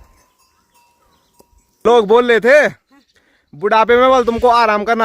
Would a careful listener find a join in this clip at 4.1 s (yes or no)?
no